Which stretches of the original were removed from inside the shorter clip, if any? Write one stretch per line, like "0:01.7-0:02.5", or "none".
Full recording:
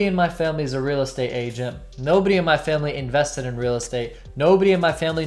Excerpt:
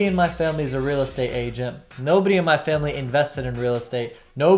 none